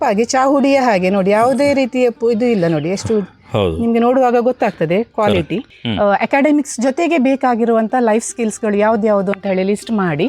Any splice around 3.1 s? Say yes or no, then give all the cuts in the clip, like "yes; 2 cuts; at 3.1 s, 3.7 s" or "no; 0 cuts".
no; 1 cut; at 5.7 s